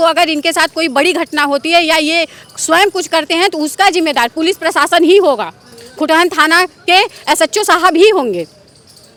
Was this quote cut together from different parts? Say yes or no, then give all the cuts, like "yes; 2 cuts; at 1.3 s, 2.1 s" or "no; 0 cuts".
no; 0 cuts